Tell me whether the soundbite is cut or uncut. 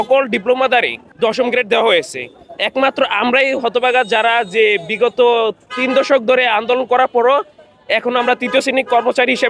cut